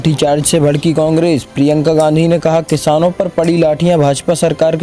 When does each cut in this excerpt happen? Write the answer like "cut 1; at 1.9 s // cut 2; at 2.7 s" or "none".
none